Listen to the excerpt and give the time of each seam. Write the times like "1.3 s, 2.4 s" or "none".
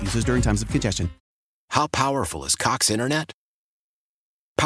1.2 s